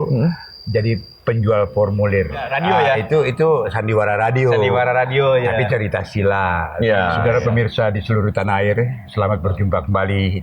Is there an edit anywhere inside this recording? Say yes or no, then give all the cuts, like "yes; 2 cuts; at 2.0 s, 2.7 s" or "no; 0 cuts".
yes; 2 cuts; at 2.5 s, 7.2 s